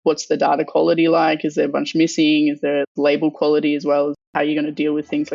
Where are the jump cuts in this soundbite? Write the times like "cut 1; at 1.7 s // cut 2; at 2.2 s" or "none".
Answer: cut 1; at 4.3 s